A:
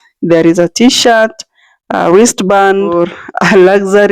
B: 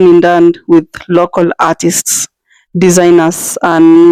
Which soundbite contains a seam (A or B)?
A